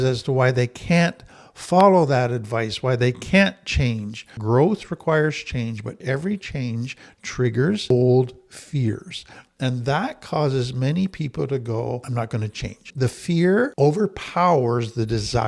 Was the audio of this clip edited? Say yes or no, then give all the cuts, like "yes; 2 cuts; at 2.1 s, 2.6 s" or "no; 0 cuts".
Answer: yes; 4 cuts; at 4.3 s, 6.0 s, 12.1 s, 13.7 s